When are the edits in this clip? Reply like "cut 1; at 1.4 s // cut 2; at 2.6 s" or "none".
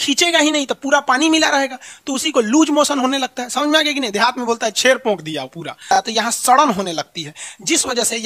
cut 1; at 5.9 s